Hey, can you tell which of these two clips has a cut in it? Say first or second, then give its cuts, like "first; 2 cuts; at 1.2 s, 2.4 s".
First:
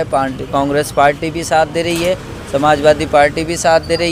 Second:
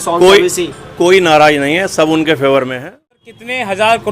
second; 1 cut; at 3.1 s